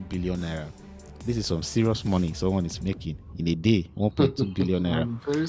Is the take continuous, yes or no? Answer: yes